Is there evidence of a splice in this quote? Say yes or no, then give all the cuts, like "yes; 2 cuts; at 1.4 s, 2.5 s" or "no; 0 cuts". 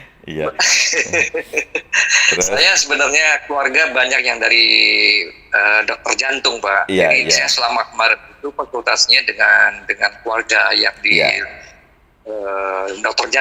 no; 0 cuts